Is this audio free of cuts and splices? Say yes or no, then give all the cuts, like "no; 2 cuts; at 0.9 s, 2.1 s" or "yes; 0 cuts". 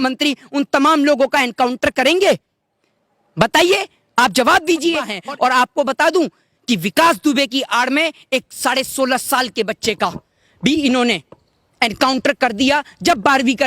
no; 1 cut; at 5.1 s